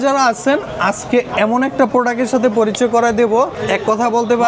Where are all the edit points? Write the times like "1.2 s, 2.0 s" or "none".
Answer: 3.6 s